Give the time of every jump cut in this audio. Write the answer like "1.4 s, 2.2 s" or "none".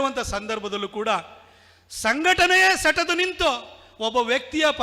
none